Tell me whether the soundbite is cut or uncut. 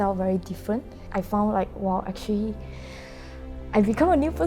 cut